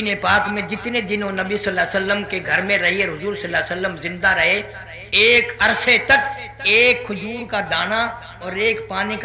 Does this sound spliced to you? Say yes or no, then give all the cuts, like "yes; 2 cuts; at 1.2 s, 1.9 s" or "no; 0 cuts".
no; 0 cuts